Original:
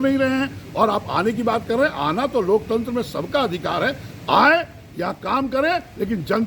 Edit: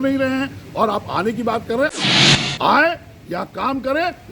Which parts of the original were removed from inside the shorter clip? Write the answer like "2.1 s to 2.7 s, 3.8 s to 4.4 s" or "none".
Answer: 2.1 s to 3.7 s